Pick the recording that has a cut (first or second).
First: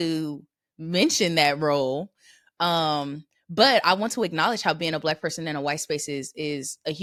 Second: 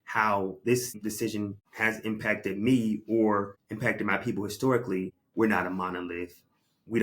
second